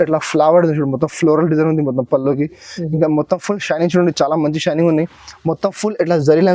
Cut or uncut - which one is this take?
uncut